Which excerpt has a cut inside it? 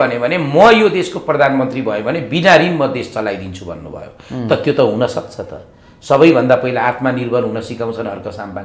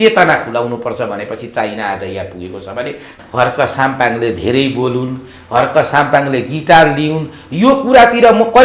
second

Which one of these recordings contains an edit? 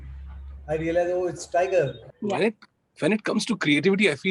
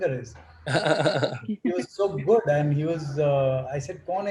first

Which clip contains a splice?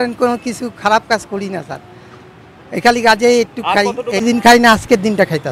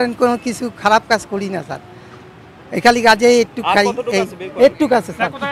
first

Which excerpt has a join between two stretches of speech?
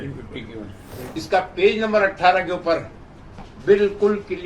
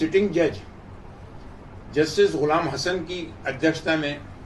first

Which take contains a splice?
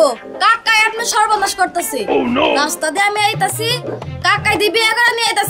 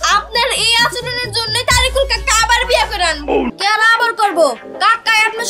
second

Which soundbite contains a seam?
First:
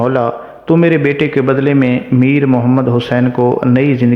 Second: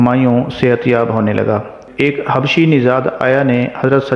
second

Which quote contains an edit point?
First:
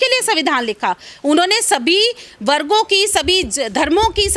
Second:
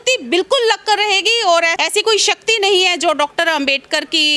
second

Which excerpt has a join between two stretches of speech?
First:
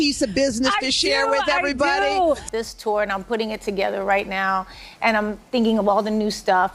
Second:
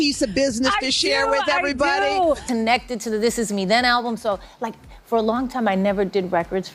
second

